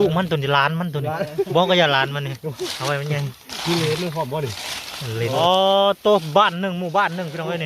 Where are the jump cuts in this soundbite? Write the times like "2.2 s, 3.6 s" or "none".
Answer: 5.4 s